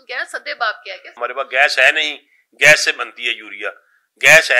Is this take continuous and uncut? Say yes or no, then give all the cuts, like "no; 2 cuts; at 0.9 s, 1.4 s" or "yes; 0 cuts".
no; 1 cut; at 1.2 s